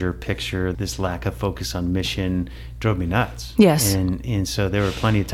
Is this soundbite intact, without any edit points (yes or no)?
yes